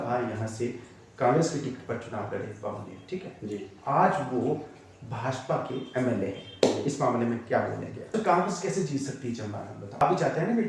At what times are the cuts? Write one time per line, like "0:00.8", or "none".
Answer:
0:08.1
0:10.0